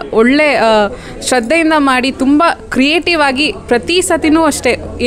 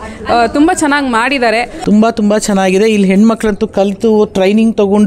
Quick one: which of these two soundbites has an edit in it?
second; 1 cut; at 1.7 s

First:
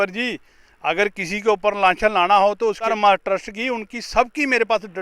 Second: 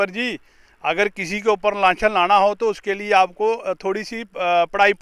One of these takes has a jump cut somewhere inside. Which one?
first; 1 cut; at 2.9 s

